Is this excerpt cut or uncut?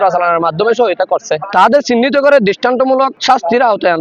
cut